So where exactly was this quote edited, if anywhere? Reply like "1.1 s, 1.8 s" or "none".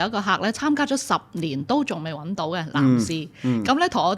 none

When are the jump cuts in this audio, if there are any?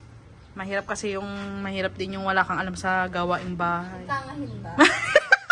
none

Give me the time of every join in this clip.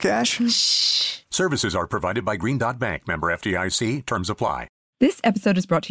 4.8 s

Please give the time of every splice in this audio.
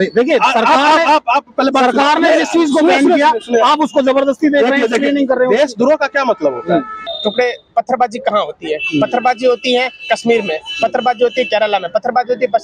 7.0 s

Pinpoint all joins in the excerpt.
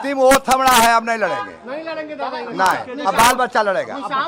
none

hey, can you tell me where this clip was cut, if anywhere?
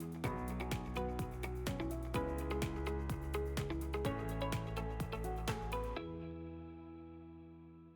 none

